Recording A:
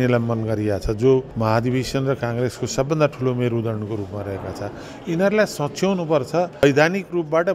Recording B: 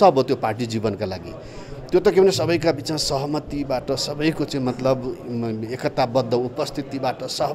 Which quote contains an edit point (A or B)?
A